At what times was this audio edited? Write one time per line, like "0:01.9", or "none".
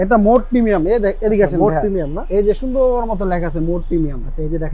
none